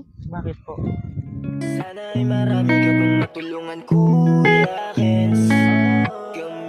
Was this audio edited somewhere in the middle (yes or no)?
yes